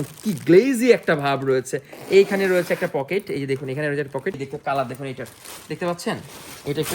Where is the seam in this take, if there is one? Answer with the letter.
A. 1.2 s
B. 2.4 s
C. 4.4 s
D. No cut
C